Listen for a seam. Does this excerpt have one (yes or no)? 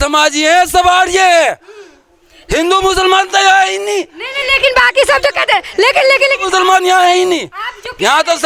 no